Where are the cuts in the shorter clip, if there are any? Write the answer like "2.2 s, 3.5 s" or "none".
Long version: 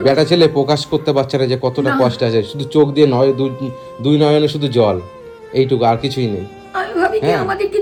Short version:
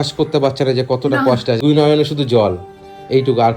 1.6 s